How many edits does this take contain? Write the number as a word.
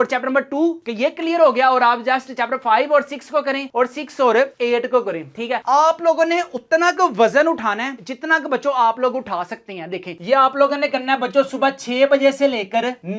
two